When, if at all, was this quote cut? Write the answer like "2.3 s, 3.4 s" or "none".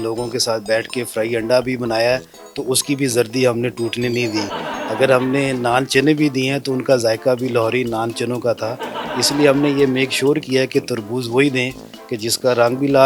none